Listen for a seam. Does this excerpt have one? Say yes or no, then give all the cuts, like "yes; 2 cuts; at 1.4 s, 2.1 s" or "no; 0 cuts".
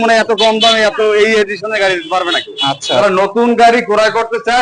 yes; 1 cut; at 3.0 s